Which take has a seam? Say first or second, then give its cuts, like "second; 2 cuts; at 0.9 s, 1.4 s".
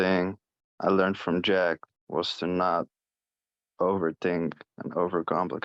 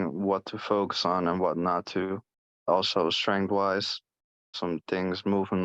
second; 2 cuts; at 2.7 s, 4.5 s